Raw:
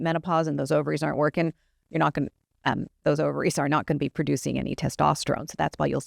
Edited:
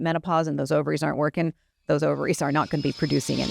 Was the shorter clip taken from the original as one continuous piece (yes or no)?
no